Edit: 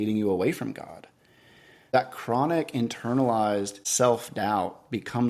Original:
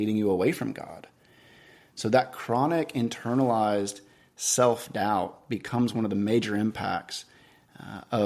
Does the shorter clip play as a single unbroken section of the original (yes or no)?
no